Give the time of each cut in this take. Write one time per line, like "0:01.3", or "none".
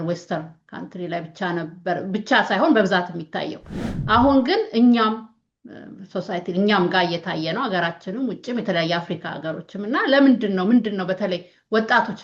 none